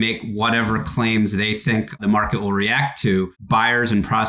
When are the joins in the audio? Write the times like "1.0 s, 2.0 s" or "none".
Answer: 2.0 s, 3.4 s